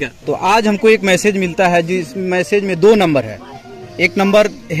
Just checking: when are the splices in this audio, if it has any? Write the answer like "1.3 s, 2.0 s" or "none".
none